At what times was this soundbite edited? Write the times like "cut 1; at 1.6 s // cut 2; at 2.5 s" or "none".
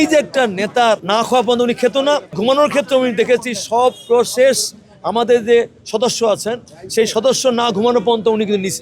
cut 1; at 1.0 s // cut 2; at 2.4 s